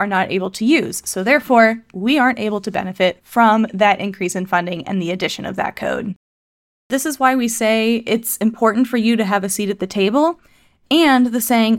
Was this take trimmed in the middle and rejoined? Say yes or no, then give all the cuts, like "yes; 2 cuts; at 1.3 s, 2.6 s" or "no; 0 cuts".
yes; 1 cut; at 6.9 s